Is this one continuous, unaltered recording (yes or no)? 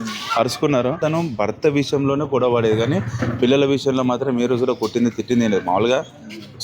no